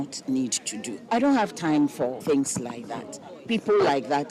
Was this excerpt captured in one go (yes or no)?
no